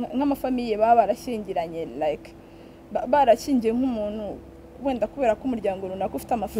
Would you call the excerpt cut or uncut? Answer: uncut